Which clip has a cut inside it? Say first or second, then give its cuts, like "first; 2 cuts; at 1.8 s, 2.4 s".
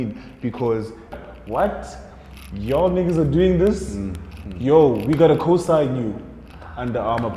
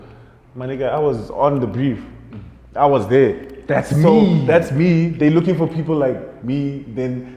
first; 1 cut; at 1.2 s